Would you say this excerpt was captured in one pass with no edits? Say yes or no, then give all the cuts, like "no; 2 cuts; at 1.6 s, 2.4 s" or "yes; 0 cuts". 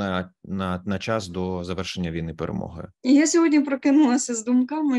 no; 1 cut; at 2.9 s